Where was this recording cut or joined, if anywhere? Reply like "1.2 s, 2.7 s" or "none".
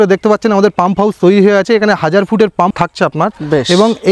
2.7 s